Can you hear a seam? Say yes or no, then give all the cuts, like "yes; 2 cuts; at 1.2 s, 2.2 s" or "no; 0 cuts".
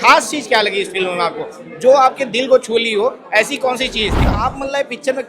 yes; 1 cut; at 4.2 s